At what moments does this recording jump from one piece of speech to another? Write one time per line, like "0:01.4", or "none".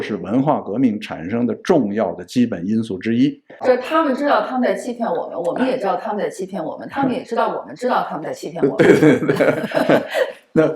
0:03.5

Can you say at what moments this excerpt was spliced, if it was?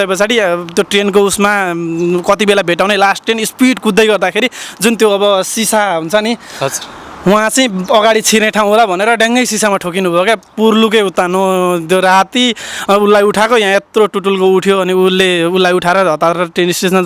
none

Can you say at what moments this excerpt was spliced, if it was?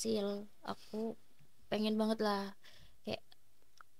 none

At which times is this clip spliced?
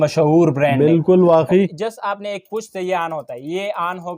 0:01.8

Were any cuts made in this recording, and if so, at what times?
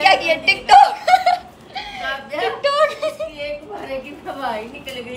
none

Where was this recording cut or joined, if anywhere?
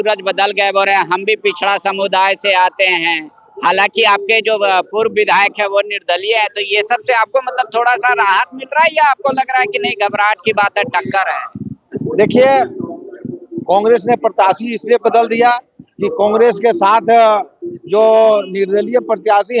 none

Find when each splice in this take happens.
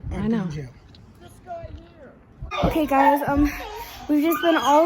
0:02.6

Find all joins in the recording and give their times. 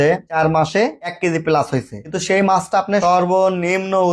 0:01.0

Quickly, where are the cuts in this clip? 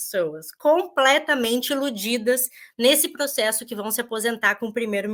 none

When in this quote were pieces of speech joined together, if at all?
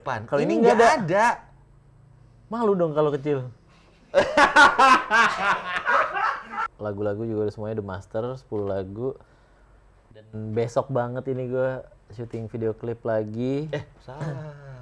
0:06.7

